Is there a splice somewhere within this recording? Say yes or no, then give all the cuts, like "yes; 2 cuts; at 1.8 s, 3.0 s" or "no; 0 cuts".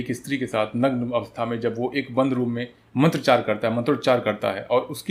no; 0 cuts